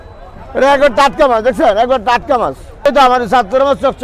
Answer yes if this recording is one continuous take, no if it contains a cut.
no